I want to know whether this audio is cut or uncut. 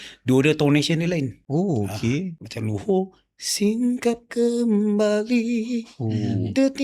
cut